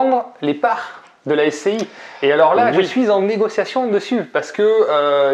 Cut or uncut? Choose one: uncut